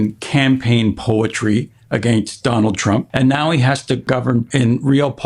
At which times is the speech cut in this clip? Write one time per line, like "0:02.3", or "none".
0:03.1
0:04.3

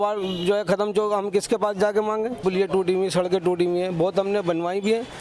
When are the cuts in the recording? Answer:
0:02.4

